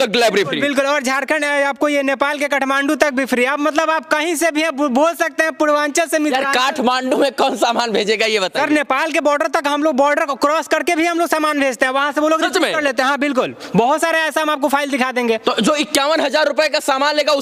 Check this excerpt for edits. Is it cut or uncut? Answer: uncut